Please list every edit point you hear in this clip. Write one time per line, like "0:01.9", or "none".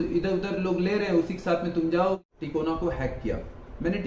0:02.2